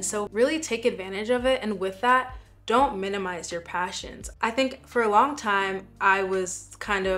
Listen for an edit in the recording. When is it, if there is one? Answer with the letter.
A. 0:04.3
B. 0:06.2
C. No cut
C